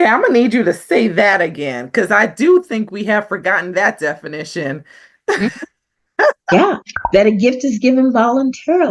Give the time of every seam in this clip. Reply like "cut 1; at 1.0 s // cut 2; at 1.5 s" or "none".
none